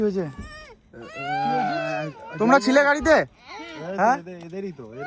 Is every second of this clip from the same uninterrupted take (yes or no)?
yes